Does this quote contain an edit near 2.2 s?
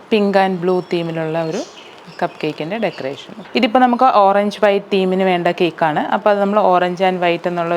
no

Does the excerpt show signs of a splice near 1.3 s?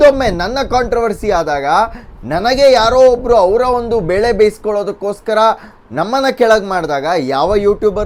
no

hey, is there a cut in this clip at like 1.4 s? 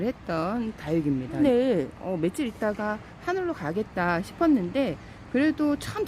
yes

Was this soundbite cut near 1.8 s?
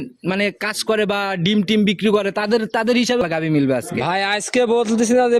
no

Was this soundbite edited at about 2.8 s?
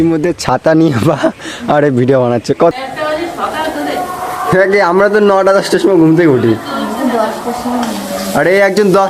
yes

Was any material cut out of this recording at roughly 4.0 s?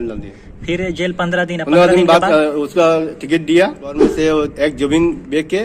yes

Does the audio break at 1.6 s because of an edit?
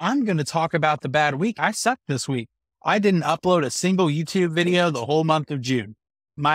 yes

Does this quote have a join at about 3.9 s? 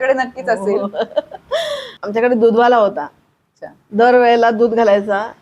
no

